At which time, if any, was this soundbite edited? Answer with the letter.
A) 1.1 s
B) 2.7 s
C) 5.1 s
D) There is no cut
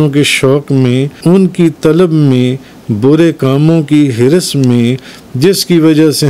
A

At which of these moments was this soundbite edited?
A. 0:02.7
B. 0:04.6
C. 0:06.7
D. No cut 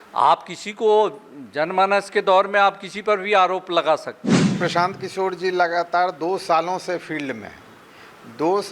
B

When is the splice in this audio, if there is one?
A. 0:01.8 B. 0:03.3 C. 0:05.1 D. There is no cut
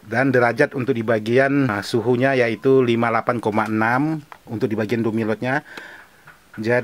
A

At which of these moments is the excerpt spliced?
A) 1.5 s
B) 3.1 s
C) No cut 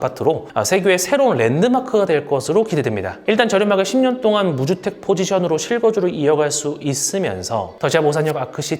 B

